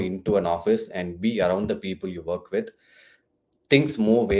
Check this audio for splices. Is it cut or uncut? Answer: uncut